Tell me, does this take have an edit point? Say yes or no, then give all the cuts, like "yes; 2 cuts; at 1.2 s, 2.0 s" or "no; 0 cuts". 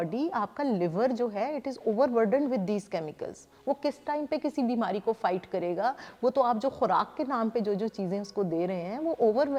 no; 0 cuts